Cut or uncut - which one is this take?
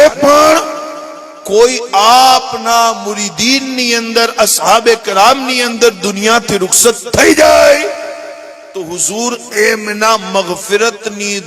uncut